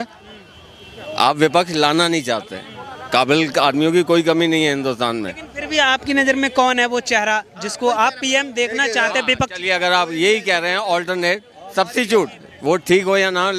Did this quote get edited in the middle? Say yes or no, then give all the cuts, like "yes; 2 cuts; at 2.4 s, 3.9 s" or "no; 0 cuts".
no; 0 cuts